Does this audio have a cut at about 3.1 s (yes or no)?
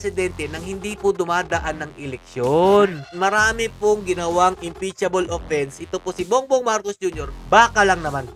yes